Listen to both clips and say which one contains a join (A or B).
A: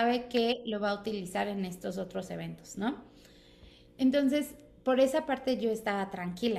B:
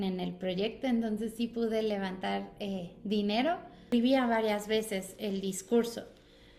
B